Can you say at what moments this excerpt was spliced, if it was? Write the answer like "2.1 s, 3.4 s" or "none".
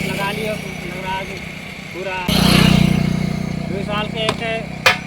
2.3 s